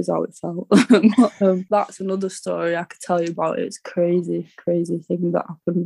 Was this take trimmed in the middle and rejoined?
yes; 1 cut; at 1.6 s

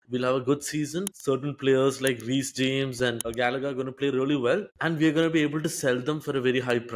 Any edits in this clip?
no; 0 cuts

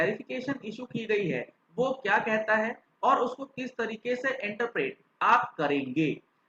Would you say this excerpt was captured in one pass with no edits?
yes; 0 cuts

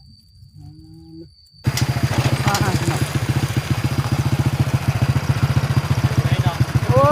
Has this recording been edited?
yes; 1 cut; at 1.6 s

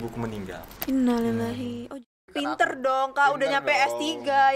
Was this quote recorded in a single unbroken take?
no; 1 cut; at 1.7 s

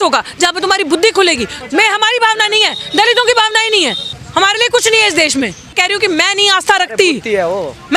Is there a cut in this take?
yes; 3 cuts; at 1.5 s, 4.2 s, 5.7 s

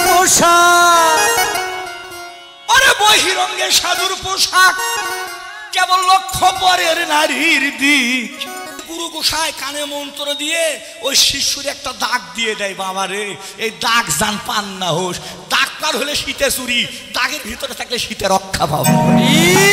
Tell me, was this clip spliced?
yes; 1 cut; at 8.5 s

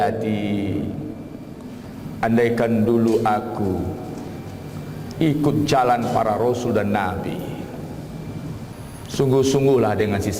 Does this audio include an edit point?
yes; 1 cut; at 8.7 s

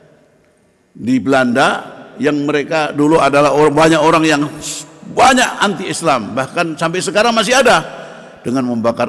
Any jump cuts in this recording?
no; 0 cuts

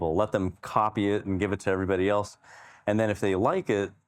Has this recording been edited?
no; 0 cuts

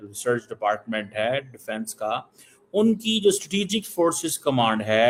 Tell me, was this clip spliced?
no; 0 cuts

